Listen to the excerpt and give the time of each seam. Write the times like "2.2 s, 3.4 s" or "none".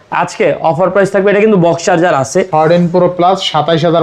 2.5 s